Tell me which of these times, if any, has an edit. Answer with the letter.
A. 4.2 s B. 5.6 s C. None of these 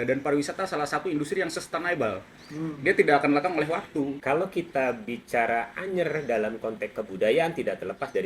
A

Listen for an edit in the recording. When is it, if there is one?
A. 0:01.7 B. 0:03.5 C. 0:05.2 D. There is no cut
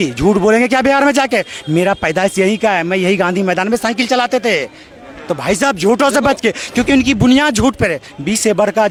D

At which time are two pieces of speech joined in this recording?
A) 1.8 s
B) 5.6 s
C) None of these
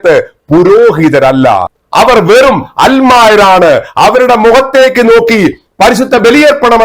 A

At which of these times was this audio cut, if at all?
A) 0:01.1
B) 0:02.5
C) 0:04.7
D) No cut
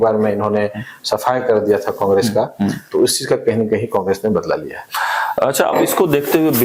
D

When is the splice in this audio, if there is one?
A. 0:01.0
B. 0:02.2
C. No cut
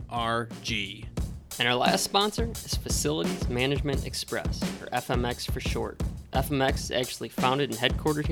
A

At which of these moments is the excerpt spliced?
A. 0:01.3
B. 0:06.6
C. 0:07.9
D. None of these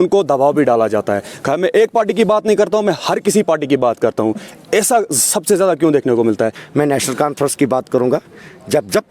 B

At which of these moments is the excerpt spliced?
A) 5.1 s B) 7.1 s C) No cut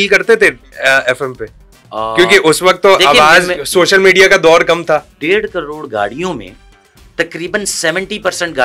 A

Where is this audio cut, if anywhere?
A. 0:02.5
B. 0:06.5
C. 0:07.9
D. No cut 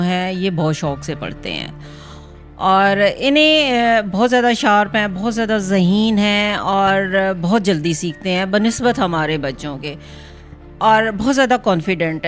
D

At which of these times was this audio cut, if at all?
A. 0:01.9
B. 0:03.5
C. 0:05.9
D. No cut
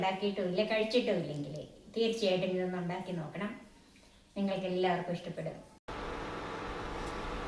C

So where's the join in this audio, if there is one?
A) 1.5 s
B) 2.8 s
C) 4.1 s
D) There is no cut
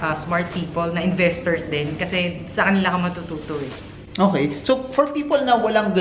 D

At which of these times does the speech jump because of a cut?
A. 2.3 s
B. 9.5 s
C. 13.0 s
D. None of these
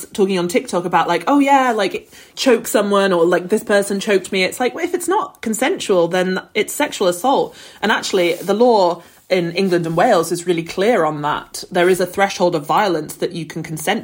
A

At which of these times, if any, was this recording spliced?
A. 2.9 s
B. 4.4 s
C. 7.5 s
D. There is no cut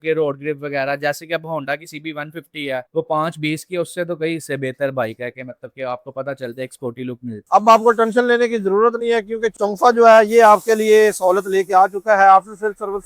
C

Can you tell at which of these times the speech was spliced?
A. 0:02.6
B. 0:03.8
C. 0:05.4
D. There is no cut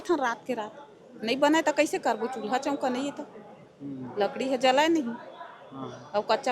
D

